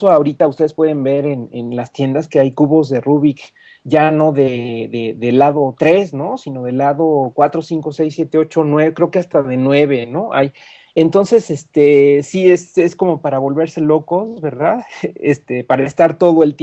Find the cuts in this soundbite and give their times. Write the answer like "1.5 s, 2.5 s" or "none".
15.1 s